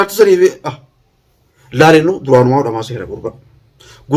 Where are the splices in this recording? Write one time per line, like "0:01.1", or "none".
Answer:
0:01.6

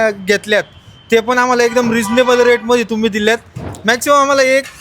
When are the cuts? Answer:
0:03.7

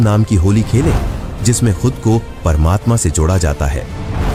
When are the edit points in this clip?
none

